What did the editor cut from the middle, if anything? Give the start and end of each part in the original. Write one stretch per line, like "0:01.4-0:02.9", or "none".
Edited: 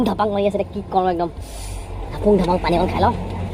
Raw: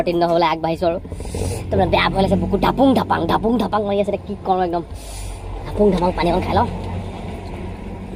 none